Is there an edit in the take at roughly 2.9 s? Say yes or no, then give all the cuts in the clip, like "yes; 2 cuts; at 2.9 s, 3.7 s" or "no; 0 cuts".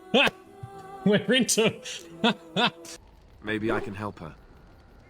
yes; 1 cut; at 2.9 s